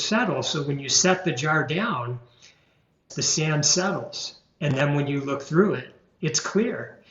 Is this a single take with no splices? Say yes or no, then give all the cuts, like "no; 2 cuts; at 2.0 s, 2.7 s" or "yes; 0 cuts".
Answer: no; 1 cut; at 3.1 s